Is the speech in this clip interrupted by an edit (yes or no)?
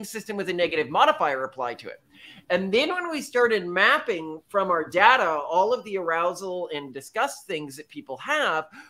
no